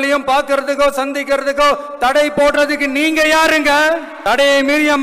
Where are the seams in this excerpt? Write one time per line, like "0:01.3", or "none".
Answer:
0:04.1